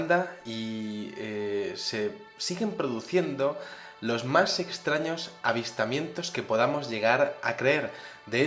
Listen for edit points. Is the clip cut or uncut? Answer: uncut